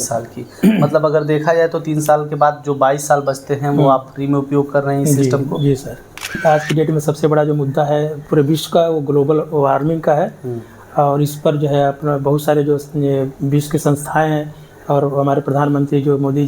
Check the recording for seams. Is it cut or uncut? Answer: cut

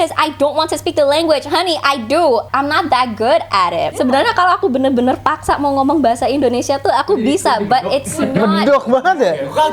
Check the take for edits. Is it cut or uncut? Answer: cut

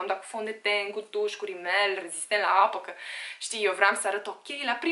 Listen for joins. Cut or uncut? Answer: uncut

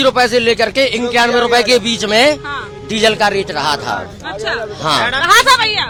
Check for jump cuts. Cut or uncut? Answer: uncut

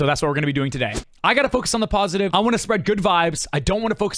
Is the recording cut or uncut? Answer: cut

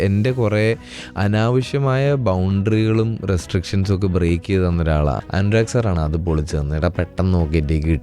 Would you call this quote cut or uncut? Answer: cut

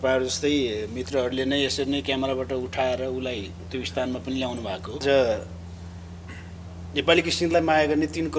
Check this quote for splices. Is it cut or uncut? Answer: cut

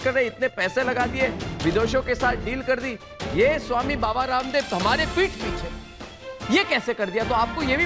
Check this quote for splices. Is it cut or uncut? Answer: uncut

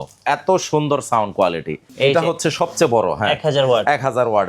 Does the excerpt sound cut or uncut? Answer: cut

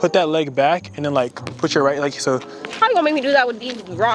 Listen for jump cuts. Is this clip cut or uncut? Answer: cut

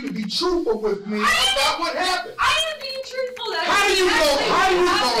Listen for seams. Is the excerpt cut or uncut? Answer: uncut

